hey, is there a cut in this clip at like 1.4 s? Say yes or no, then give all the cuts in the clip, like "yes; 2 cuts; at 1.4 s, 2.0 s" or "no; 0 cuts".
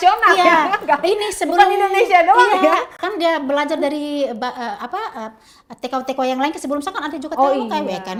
no; 0 cuts